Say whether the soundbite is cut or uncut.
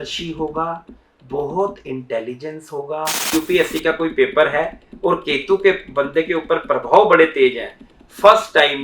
cut